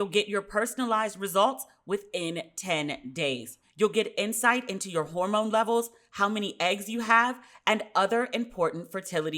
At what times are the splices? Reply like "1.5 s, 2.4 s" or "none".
3.6 s

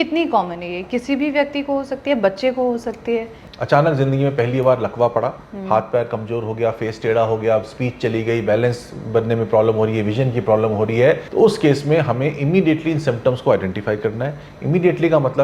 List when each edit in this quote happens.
3.4 s, 11.3 s

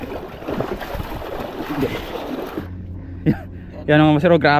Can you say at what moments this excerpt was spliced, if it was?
2.6 s

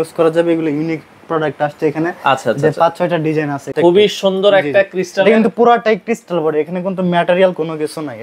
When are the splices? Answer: 3.7 s

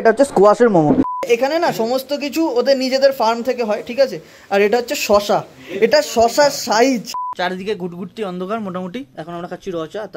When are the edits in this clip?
1.1 s, 7.2 s

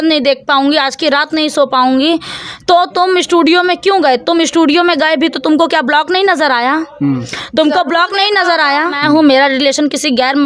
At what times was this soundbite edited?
9.0 s

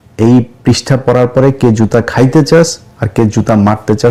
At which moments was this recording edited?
none

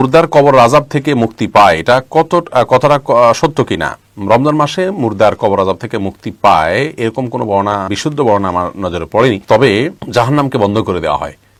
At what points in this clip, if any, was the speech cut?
none

